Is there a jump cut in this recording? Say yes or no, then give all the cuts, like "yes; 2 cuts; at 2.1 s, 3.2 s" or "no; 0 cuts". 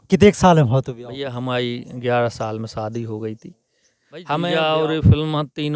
yes; 1 cut; at 4.2 s